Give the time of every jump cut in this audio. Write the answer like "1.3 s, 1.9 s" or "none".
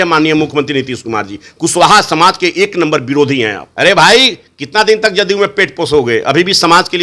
3.6 s